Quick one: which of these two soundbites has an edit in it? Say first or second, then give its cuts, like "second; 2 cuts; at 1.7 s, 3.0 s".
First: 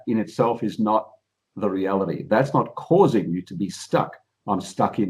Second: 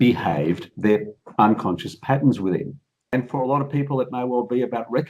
second; 1 cut; at 3.1 s